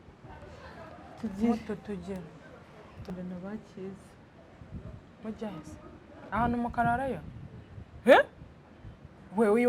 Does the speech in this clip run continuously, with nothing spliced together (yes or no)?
no